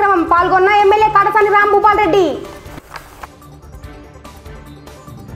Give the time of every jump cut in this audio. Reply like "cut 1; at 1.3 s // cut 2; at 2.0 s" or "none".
none